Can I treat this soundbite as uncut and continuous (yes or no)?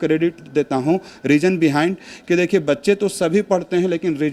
yes